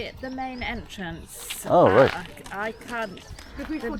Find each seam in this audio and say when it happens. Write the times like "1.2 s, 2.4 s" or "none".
none